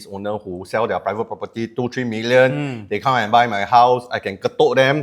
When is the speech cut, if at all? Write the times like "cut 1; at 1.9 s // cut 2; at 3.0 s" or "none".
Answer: none